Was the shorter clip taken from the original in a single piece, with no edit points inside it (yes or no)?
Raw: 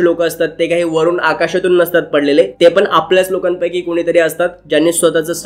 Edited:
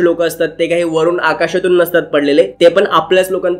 yes